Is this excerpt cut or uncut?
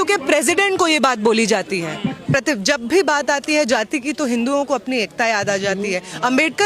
cut